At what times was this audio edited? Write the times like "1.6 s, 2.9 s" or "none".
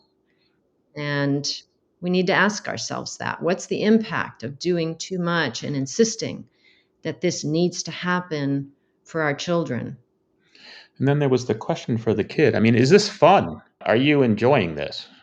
13.8 s